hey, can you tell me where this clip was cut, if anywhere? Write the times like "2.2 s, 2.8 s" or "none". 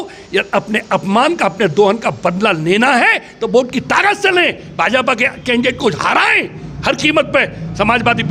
none